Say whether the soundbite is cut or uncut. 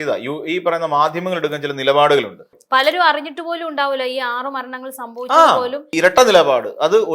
cut